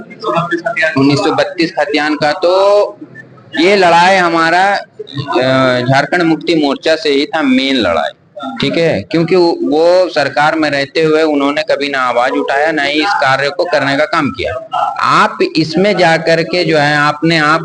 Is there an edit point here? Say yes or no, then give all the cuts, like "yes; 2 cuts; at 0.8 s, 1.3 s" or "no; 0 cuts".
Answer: no; 0 cuts